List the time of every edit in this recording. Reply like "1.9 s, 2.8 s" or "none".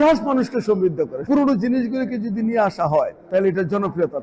1.2 s, 3.2 s